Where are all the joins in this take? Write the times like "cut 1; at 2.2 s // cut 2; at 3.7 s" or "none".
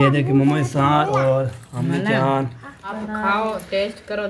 cut 1; at 3.0 s